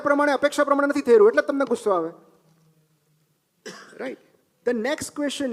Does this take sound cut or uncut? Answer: uncut